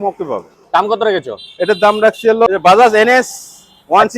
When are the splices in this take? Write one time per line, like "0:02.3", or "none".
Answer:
0:02.5

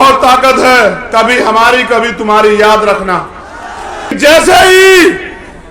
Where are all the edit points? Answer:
0:04.2

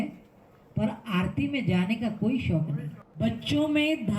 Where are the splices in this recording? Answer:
0:03.0

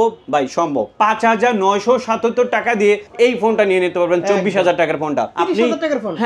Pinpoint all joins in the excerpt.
0:00.9
0:03.1
0:05.3

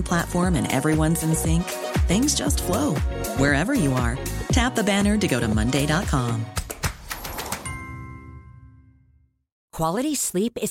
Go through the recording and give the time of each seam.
0:09.6

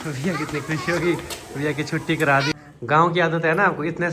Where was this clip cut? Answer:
0:02.5

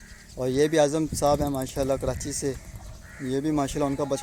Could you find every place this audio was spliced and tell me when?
none

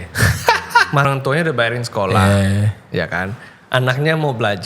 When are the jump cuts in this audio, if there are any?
0:01.0

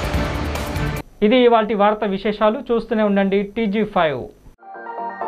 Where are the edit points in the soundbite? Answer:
none

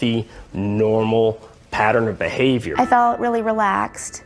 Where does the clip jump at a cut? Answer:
0:02.7

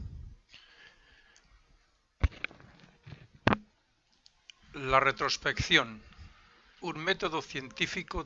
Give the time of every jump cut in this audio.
none

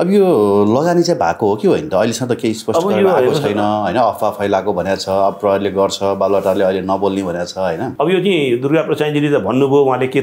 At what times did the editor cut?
0:07.9

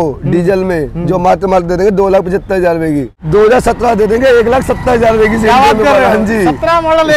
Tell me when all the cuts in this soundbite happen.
0:03.1

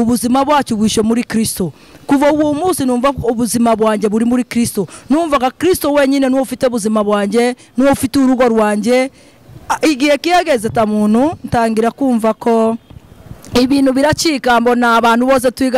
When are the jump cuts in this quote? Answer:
none

